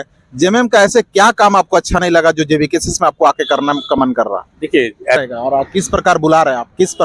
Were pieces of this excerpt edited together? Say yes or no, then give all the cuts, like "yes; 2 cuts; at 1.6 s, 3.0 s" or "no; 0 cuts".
yes; 1 cut; at 5.2 s